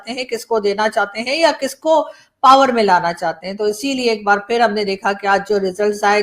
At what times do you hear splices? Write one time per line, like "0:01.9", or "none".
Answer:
none

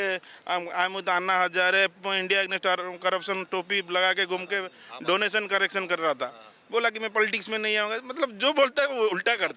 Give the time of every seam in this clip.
none

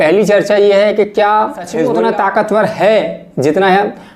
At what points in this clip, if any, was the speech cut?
0:01.8

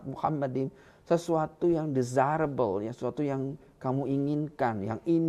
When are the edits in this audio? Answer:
none

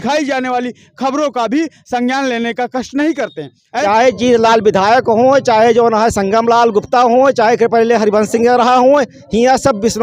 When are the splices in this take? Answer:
0:03.7

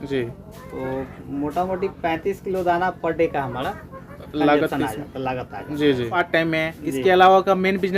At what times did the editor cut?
0:06.2

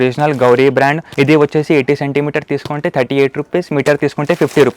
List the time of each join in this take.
0:01.0

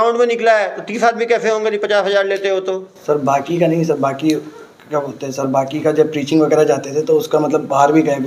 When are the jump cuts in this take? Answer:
none

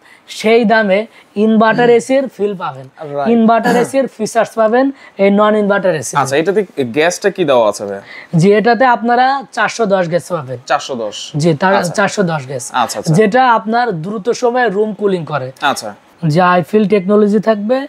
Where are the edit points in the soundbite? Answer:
none

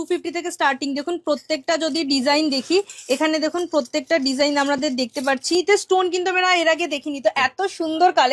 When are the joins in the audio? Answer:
0:05.5

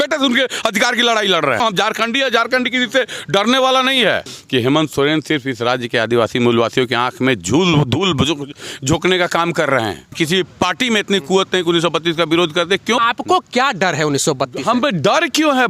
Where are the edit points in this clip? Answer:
0:01.6
0:04.3
0:10.1
0:13.0

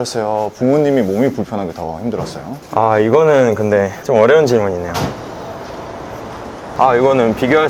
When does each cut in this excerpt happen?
none

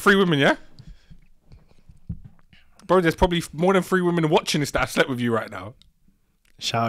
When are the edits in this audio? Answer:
none

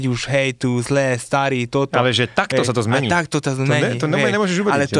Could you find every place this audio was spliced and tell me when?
none

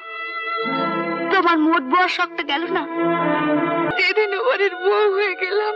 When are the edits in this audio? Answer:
0:03.9

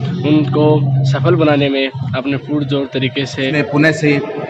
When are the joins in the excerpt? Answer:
0:03.5

